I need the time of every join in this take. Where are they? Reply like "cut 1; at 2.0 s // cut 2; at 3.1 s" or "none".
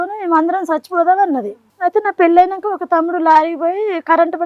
cut 1; at 1.6 s